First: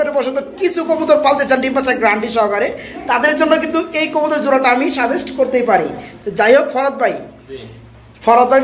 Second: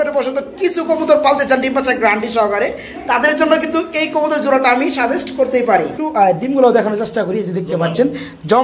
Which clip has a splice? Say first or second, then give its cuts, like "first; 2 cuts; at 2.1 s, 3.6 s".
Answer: second; 1 cut; at 6.0 s